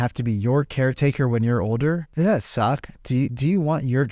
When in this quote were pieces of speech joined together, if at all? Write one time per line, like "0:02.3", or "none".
0:02.1